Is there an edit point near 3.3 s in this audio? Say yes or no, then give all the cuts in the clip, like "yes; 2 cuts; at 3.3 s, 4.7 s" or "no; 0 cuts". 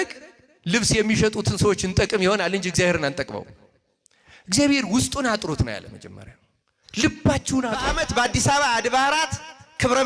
no; 1 cut; at 7.9 s